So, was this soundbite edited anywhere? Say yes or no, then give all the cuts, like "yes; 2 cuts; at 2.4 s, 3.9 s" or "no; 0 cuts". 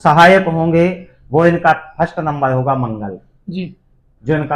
no; 0 cuts